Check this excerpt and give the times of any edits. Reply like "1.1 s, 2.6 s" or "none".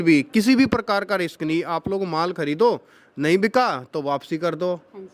none